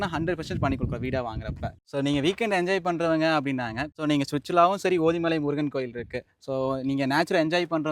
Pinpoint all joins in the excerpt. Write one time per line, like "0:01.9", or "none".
0:01.7
0:03.8